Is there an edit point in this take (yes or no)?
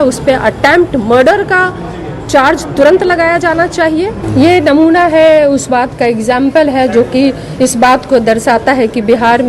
yes